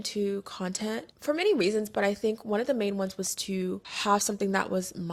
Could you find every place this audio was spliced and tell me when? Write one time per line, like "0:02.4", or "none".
none